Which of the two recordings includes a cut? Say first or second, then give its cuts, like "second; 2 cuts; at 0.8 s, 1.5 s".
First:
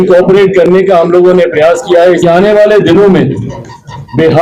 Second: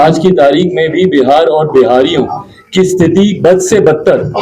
first; 1 cut; at 2.2 s